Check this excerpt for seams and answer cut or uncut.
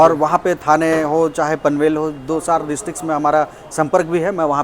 uncut